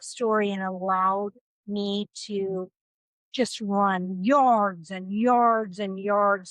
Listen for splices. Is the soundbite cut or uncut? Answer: uncut